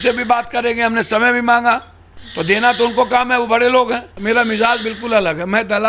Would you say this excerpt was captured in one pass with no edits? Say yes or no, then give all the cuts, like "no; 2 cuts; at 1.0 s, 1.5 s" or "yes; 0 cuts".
no; 1 cut; at 4.1 s